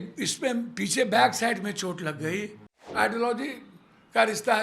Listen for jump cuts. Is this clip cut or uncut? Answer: cut